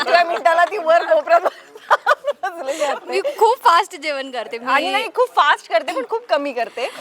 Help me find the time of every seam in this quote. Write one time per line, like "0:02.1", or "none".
none